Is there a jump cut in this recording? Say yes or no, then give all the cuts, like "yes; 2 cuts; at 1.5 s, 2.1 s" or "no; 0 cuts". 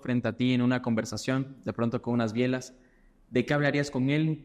no; 0 cuts